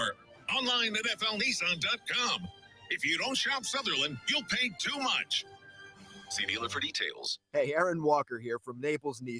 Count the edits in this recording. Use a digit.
1